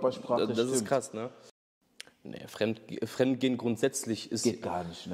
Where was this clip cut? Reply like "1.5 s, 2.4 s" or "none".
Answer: 1.4 s

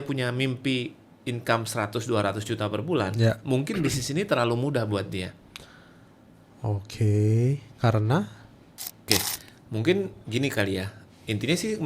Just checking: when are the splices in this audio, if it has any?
9.1 s

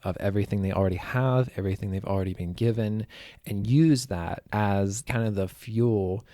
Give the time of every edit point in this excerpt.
4.4 s, 5.0 s

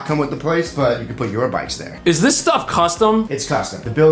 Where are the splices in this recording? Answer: 1.8 s, 3.4 s

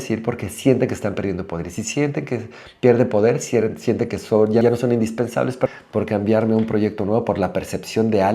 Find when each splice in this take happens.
4.6 s, 5.7 s

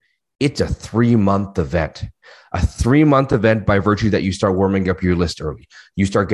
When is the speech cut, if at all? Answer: none

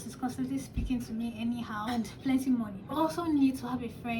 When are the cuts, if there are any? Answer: 1.9 s, 2.9 s

